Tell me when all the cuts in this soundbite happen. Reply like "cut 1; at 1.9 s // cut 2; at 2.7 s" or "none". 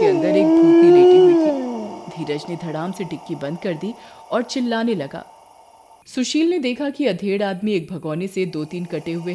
cut 1; at 6.0 s